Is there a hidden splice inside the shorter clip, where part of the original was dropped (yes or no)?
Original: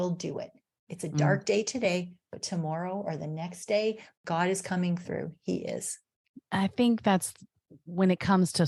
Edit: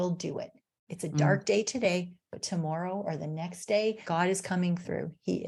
yes